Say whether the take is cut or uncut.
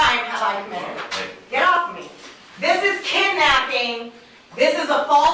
uncut